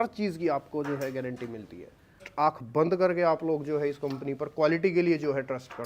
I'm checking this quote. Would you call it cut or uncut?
cut